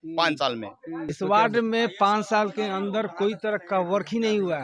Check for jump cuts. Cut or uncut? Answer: cut